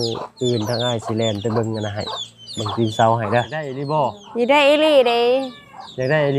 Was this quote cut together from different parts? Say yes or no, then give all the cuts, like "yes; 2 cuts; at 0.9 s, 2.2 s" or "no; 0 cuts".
yes; 1 cut; at 3.8 s